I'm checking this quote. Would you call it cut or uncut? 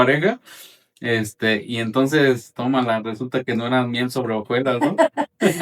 uncut